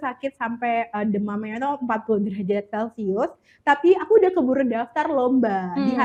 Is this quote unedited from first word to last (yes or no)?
yes